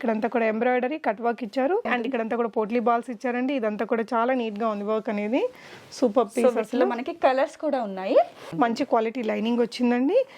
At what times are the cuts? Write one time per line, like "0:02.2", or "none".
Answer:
0:01.9
0:08.5